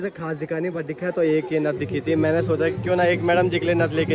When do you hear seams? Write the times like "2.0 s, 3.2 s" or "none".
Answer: none